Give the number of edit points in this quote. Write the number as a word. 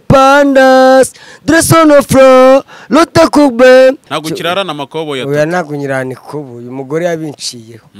one